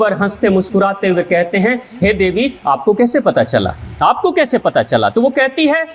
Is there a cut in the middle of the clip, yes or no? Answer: no